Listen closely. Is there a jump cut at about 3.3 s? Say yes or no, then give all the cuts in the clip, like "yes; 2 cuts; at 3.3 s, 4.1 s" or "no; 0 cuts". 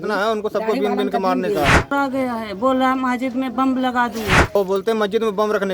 no; 2 cuts; at 1.9 s, 4.6 s